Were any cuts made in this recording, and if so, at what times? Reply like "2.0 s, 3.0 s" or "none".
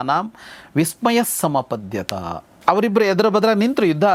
none